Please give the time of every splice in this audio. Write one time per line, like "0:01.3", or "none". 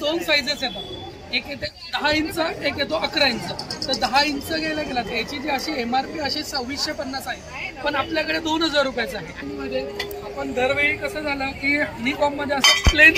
0:09.5